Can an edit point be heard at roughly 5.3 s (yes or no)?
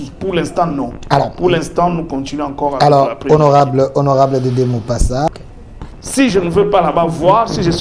yes